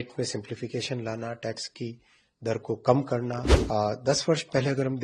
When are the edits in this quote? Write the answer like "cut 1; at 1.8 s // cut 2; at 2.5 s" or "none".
cut 1; at 3.5 s